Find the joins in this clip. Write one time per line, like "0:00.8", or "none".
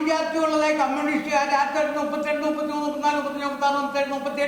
none